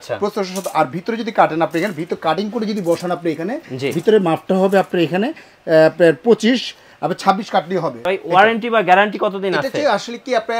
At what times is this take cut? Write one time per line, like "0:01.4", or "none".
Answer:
0:08.0